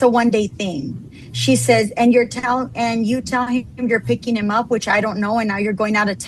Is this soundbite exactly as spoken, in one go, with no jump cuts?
yes; 0 cuts

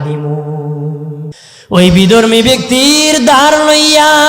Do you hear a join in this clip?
yes; 1 cut; at 1.4 s

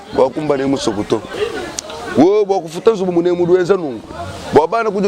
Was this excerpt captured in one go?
no; 1 cut; at 1.3 s

